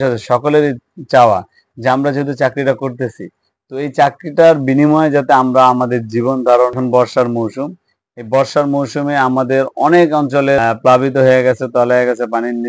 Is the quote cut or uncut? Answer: cut